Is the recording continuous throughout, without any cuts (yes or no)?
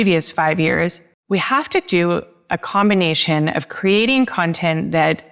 no